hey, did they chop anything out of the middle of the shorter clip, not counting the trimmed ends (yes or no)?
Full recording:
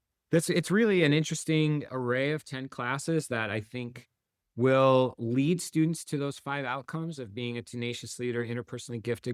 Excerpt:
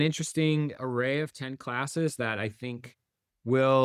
no